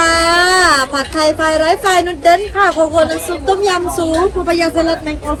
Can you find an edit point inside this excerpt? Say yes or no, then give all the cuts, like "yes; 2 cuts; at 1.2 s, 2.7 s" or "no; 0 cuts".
no; 0 cuts